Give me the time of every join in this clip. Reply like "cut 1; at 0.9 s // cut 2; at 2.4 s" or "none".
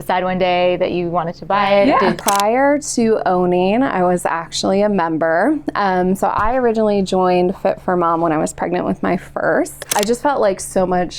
cut 1; at 2.2 s // cut 2; at 9.8 s